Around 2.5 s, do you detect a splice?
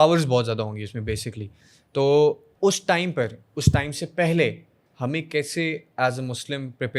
yes; 1 cut; at 2.5 s

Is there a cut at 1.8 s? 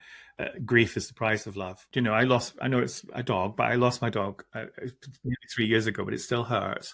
yes; 1 cut; at 1.8 s

